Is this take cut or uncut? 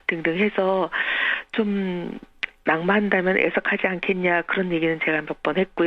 cut